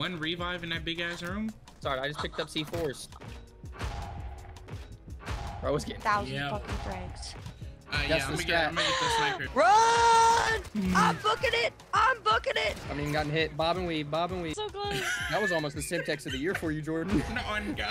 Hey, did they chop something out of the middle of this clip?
yes; 3 cuts; at 3.1 s, 9.4 s, 14.6 s

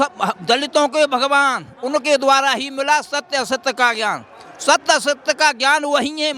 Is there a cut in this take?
no; 0 cuts

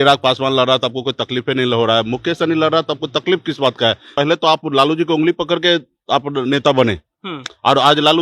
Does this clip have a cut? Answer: yes; 1 cut; at 4.1 s

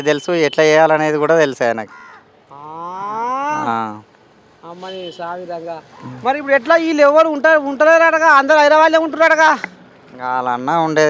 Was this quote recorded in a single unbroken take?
no; 1 cut; at 1.5 s

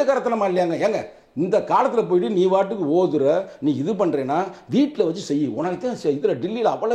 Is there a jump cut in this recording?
no; 0 cuts

